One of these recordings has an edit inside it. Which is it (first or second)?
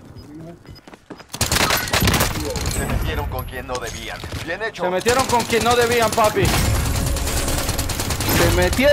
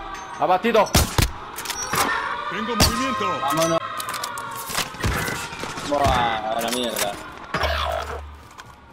second